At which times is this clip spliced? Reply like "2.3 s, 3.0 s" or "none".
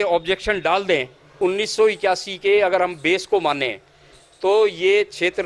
1.3 s